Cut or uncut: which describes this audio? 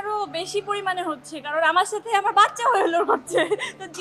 uncut